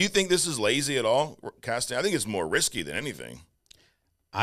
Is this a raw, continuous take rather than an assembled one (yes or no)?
yes